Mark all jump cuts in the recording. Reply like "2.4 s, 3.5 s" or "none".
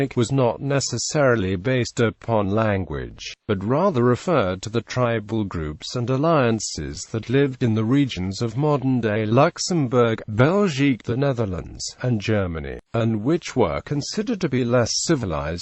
4.0 s